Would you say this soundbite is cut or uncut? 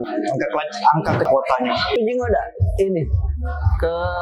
cut